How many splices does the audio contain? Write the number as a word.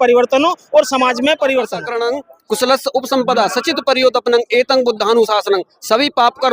one